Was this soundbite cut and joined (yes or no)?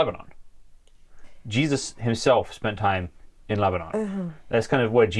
no